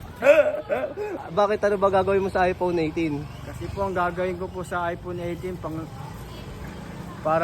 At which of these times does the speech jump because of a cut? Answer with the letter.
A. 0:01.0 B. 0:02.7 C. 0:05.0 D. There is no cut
A